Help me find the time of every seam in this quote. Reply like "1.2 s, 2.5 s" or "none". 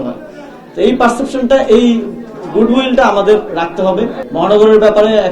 4.2 s